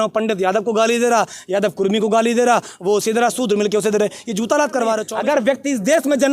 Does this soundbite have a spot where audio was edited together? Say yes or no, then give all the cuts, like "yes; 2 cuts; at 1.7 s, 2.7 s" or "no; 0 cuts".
yes; 1 cut; at 5.1 s